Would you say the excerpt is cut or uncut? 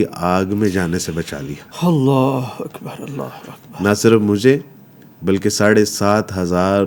uncut